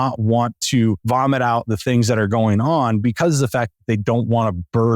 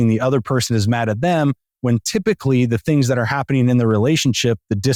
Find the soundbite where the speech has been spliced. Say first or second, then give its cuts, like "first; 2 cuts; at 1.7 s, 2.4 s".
first; 1 cut; at 1.0 s